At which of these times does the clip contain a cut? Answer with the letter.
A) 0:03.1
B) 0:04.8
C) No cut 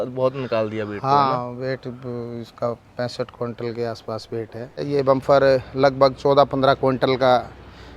B